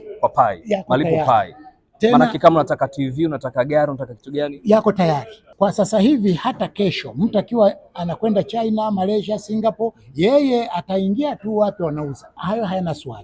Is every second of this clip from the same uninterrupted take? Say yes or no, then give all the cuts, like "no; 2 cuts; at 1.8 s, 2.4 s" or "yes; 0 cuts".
no; 2 cuts; at 5.4 s, 12.3 s